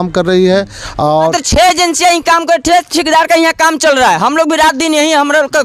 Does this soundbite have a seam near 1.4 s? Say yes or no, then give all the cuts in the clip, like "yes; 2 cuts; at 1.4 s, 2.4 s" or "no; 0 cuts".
yes; 1 cut; at 1.4 s